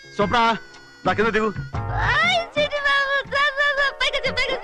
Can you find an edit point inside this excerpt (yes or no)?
no